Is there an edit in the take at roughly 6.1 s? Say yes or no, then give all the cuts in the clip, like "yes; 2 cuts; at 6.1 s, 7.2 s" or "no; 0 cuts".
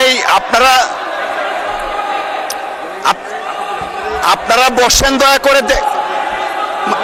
no; 0 cuts